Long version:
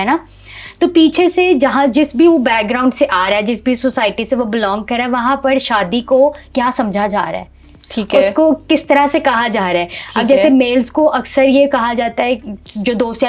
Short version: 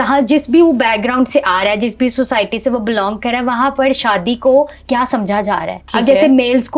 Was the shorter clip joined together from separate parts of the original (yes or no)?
yes